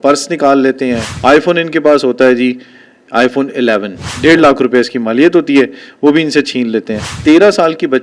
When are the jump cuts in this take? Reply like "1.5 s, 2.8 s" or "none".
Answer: 1.1 s, 4.1 s, 7.0 s

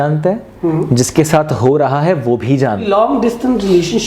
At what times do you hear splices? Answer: 2.9 s

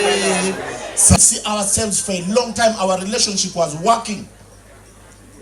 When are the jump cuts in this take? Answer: 1.2 s

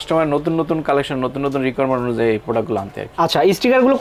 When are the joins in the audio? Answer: none

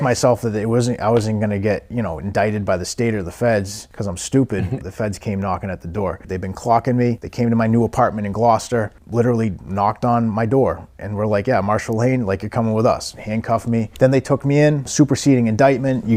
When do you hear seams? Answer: none

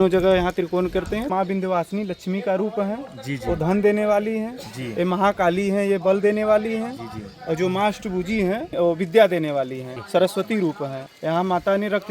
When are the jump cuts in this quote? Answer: 1.3 s, 8.7 s, 10.0 s, 11.0 s

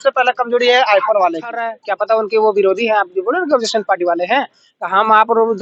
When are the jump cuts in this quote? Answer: 1.7 s

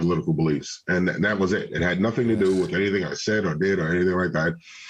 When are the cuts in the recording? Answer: none

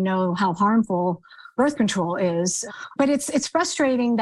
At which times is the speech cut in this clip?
1.5 s, 2.9 s

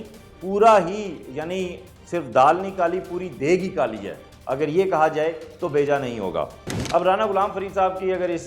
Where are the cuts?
6.7 s

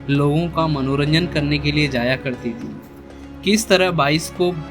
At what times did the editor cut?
2.9 s

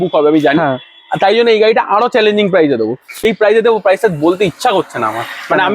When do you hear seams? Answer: 3.1 s

